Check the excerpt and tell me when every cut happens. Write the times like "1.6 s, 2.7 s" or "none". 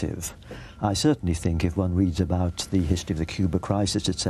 none